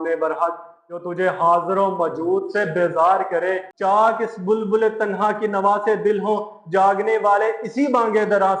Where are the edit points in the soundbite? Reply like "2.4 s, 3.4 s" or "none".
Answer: 3.7 s